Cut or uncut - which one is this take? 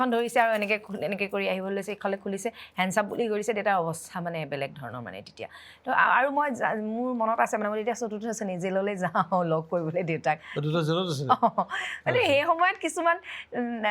uncut